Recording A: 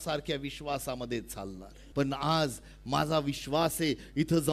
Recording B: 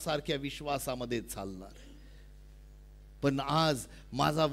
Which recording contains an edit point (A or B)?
A